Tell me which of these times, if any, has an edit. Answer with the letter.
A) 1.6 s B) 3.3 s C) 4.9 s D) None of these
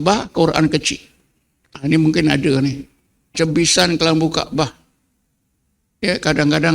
B